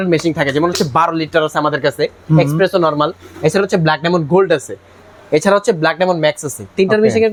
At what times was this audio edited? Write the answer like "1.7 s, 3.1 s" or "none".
none